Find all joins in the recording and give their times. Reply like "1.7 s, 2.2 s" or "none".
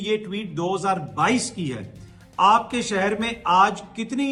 none